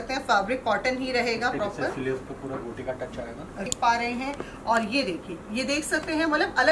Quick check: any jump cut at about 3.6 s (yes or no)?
yes